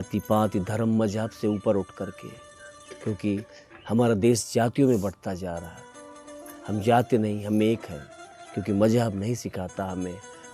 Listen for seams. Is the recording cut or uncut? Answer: uncut